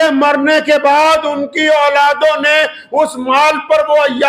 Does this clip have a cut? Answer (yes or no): no